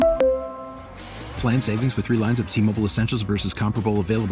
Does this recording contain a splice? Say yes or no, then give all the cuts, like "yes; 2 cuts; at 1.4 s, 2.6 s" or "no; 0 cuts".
no; 0 cuts